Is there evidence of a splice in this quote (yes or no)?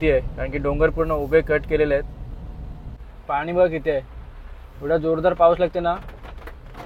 yes